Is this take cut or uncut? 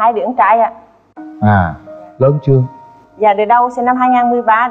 uncut